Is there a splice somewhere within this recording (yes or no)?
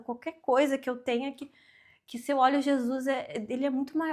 no